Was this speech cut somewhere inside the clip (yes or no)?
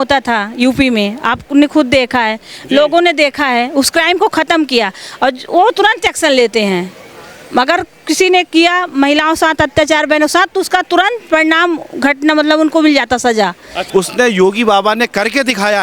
yes